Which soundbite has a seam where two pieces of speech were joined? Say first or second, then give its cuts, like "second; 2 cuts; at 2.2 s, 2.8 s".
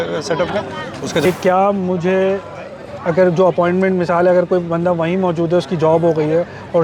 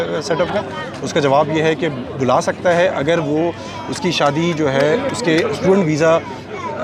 first; 1 cut; at 1.2 s